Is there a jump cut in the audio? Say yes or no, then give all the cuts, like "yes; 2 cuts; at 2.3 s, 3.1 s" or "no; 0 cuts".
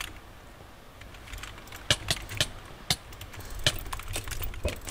no; 0 cuts